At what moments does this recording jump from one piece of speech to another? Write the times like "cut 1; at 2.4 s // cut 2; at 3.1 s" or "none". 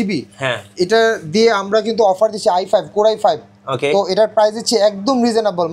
none

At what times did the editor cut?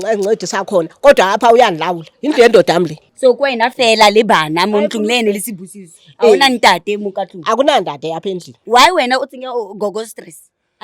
cut 1; at 3.0 s // cut 2; at 8.5 s

